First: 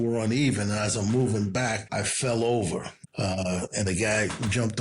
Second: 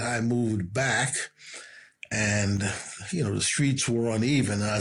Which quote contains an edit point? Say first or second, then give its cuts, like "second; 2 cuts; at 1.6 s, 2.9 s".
first; 2 cuts; at 1.8 s, 2.9 s